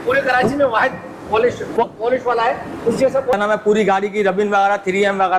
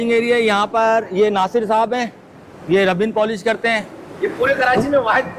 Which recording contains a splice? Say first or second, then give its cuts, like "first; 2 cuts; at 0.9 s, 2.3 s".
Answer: first; 1 cut; at 3.3 s